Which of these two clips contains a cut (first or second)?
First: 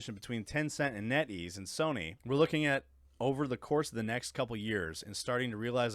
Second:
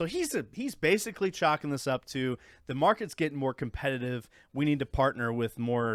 first